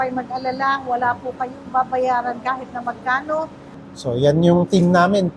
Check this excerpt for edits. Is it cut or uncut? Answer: cut